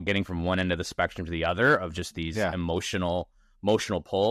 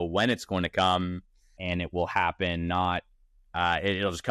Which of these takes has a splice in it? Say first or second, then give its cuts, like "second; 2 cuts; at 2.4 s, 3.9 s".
second; 2 cuts; at 1.6 s, 3.3 s